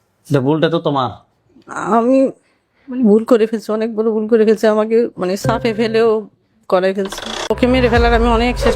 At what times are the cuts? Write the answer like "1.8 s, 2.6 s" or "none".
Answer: 7.5 s